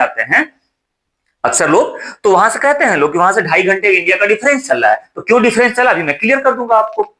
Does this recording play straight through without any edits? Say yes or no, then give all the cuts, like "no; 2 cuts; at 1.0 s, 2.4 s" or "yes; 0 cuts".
yes; 0 cuts